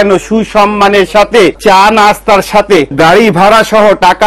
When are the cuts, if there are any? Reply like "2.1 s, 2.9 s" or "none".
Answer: 1.6 s, 2.9 s